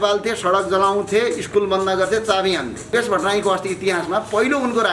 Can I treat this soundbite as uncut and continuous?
no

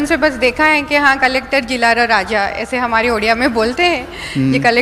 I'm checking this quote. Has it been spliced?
no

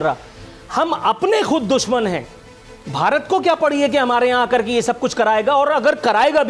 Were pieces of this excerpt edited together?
no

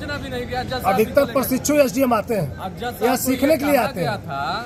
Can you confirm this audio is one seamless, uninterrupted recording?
yes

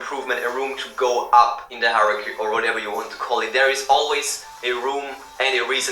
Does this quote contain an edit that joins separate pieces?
no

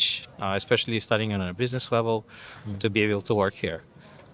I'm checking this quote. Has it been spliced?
no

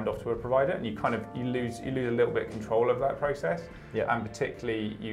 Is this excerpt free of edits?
yes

